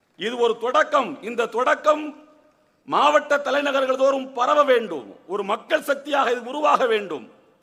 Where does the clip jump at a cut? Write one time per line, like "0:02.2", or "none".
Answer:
none